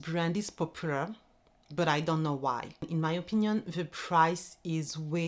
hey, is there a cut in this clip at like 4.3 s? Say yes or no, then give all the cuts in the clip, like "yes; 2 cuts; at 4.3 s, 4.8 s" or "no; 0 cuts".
no; 1 cut; at 2.8 s